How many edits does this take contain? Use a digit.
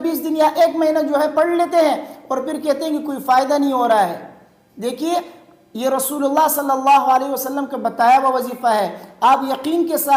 0